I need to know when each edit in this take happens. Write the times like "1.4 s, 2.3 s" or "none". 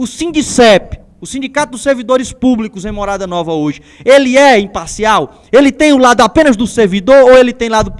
none